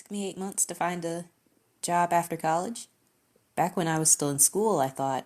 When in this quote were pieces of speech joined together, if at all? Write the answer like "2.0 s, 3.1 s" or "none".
none

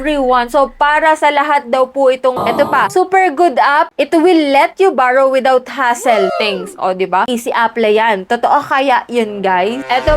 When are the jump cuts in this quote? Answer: 2.4 s

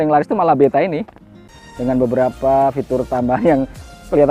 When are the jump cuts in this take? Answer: 1.5 s

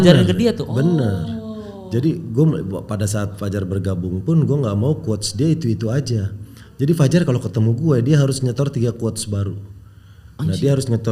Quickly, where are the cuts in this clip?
none

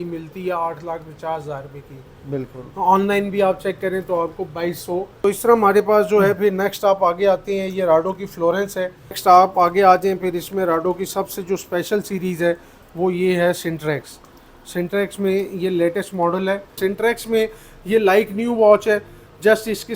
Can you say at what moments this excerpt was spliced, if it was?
5.2 s, 9.2 s, 16.7 s

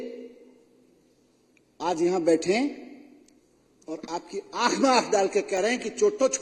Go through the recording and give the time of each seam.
none

